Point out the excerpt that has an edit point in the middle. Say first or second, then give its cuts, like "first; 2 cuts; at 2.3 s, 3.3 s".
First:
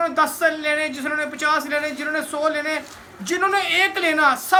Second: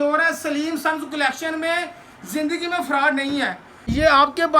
second; 1 cut; at 3.7 s